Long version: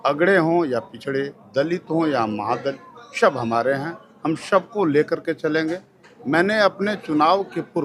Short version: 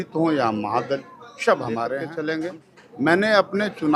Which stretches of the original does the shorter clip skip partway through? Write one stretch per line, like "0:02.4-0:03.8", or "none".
0:03.8-0:05.3